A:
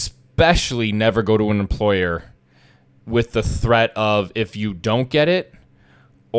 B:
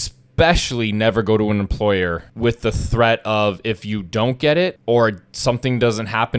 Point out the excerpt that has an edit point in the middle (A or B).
B